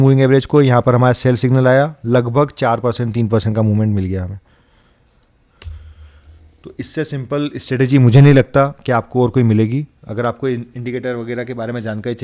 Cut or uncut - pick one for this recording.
uncut